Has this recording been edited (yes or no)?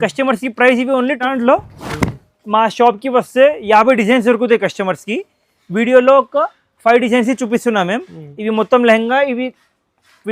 yes